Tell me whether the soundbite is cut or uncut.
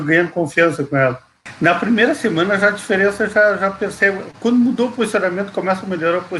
cut